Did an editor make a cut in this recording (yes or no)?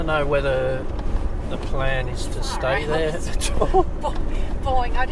no